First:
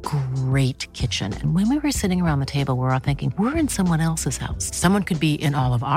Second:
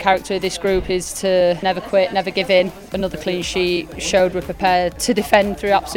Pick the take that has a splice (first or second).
second